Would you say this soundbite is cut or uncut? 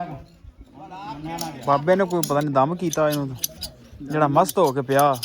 cut